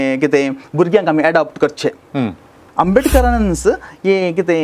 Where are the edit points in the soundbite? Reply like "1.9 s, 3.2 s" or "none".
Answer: 2.5 s

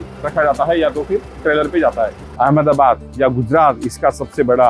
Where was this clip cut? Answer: 2.2 s

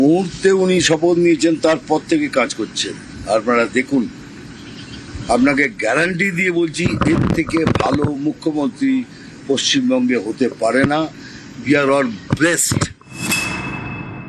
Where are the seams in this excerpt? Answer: 13.1 s

